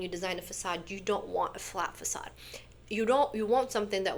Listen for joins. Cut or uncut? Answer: uncut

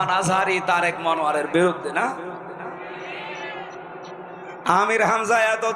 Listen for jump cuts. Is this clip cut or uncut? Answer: cut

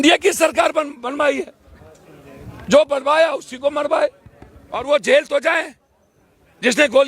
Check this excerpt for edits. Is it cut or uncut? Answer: cut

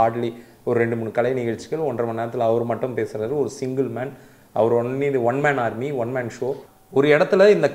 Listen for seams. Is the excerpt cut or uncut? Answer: cut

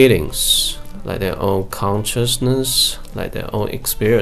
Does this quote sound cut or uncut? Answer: uncut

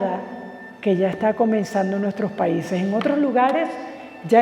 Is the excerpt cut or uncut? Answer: uncut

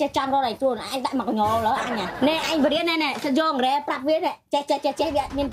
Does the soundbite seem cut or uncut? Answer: uncut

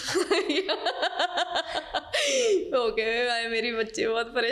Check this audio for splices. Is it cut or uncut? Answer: uncut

